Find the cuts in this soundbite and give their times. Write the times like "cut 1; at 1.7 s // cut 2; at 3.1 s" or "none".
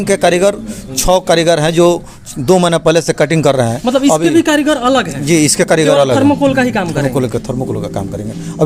none

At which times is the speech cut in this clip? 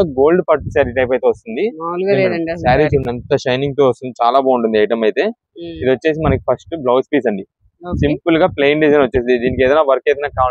none

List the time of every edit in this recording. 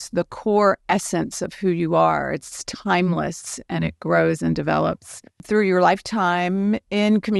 cut 1; at 5.4 s

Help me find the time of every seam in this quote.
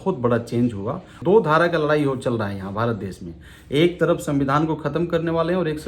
cut 1; at 1.2 s

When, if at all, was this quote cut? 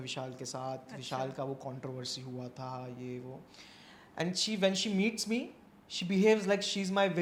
none

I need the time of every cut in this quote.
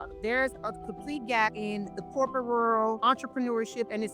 cut 1; at 1.6 s // cut 2; at 3.0 s

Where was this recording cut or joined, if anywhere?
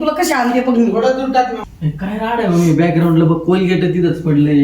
cut 1; at 1.6 s

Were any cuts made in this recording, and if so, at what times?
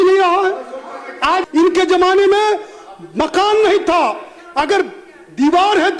cut 1; at 1.4 s

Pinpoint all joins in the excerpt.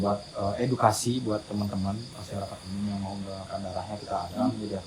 cut 1; at 2.1 s

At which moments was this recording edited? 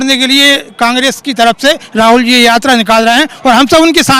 none

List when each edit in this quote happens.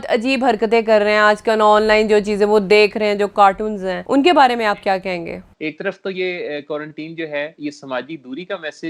cut 1; at 3.9 s // cut 2; at 5.5 s

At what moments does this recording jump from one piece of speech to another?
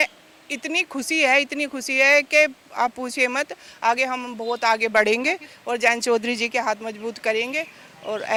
none

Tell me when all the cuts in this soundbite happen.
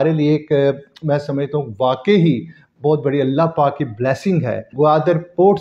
cut 1; at 4.7 s

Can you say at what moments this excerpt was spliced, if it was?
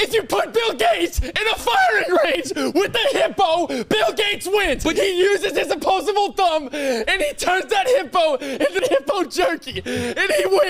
cut 1; at 4.9 s // cut 2; at 8.8 s

